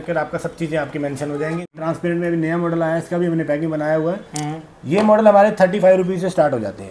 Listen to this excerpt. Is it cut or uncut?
cut